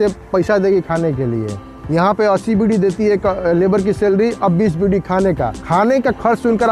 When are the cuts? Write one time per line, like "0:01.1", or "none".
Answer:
0:01.7
0:05.6